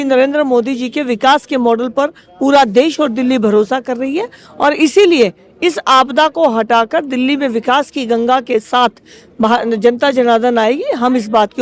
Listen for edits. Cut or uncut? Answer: uncut